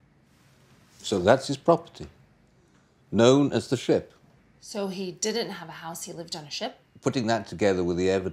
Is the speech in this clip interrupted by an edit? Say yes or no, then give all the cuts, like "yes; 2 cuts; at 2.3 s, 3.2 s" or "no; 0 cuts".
yes; 1 cut; at 6.8 s